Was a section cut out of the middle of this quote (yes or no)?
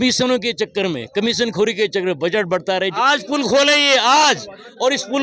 yes